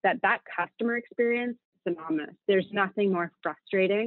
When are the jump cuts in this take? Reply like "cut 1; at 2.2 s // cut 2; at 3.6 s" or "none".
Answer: cut 1; at 2.4 s